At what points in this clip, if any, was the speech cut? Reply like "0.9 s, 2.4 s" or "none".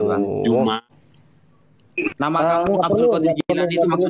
0.9 s